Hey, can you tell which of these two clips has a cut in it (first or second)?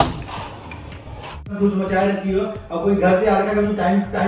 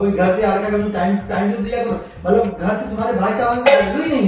first